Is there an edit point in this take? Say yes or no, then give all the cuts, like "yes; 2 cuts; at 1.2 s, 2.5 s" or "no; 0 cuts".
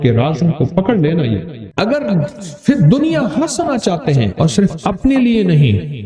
yes; 1 cut; at 1.6 s